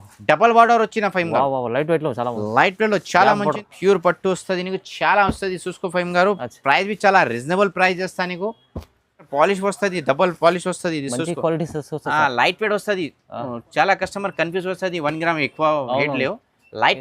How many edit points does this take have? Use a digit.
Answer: 2